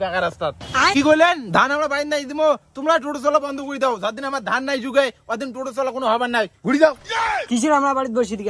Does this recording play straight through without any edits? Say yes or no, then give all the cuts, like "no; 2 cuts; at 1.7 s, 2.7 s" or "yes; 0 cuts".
no; 1 cut; at 0.9 s